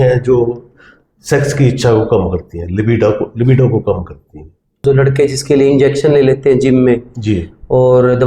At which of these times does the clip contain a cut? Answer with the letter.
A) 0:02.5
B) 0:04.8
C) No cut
B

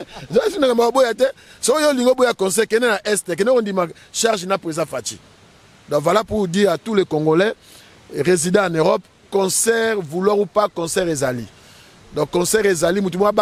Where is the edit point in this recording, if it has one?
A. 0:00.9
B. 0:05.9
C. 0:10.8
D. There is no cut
D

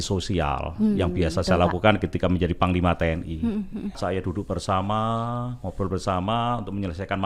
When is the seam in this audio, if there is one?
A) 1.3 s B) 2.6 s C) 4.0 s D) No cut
C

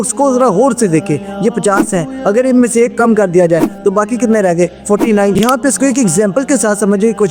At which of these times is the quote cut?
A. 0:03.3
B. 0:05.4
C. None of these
B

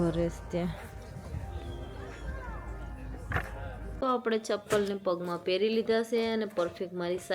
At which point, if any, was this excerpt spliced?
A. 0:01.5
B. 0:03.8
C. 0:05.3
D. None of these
B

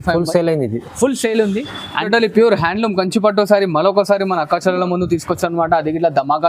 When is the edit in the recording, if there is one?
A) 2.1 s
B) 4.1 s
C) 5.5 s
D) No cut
A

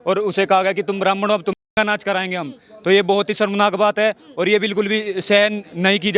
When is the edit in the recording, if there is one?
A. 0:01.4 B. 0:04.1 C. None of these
C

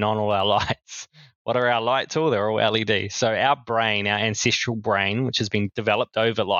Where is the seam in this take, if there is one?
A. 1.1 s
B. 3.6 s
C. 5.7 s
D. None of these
C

